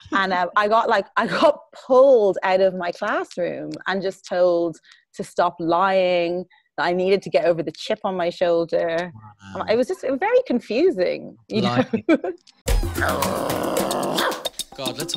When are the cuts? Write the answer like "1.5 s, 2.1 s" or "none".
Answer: 12.8 s